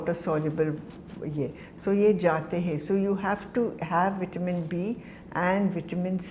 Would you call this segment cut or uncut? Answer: uncut